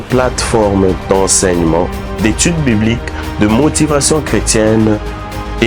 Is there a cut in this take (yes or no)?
no